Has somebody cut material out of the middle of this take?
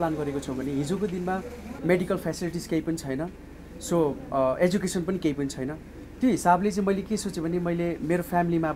yes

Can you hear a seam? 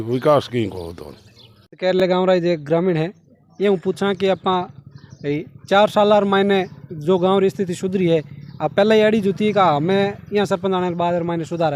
no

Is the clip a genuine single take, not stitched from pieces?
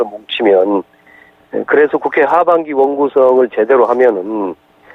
yes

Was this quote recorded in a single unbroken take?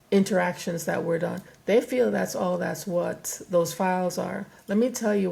yes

